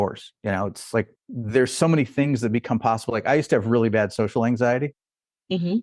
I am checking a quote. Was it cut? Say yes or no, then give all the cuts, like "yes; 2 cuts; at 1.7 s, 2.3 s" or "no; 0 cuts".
yes; 1 cut; at 1.2 s